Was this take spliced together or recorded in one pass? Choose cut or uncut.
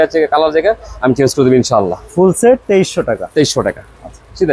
uncut